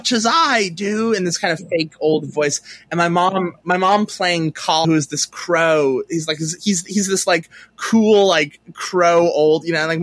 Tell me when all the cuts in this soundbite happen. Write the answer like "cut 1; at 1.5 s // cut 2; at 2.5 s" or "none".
cut 1; at 4.8 s